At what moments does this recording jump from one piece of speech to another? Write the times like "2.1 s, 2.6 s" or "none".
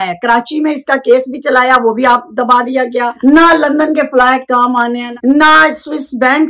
3.1 s, 5.0 s